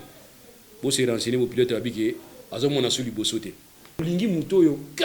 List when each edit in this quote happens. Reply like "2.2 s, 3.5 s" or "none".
4.0 s